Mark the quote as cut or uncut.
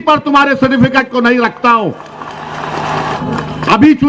cut